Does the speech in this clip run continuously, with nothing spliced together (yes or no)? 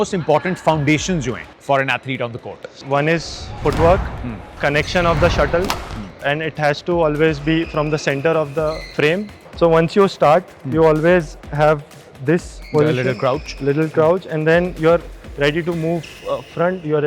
no